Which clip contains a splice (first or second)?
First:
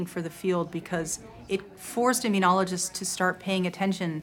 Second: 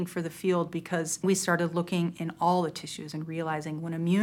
second